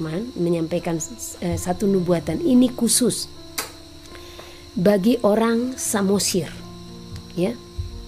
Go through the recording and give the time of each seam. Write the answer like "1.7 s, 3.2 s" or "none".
none